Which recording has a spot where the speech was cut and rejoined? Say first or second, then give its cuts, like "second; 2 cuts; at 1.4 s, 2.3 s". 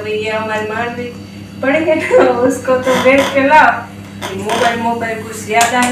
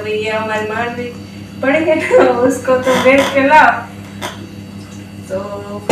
first; 1 cut; at 4.3 s